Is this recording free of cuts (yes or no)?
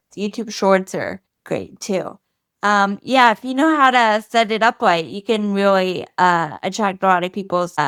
yes